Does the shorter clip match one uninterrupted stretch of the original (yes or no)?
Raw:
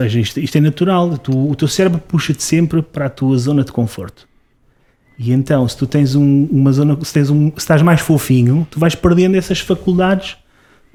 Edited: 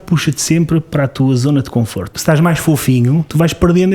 no